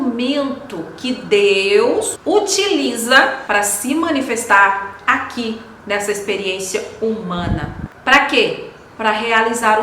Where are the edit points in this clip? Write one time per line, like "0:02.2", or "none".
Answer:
0:02.1
0:03.4